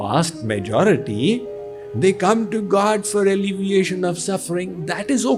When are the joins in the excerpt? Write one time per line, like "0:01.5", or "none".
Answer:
none